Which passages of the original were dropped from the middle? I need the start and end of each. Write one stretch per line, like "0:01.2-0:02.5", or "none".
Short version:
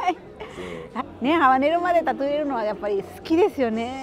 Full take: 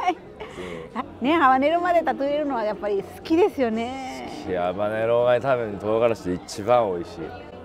none